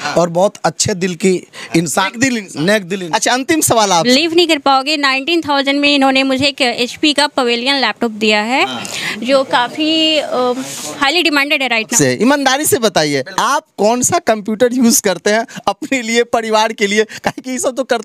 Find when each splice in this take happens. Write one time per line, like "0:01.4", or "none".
0:04.1
0:11.9